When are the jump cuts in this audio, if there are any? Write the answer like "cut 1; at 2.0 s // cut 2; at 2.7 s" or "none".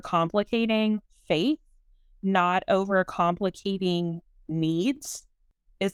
none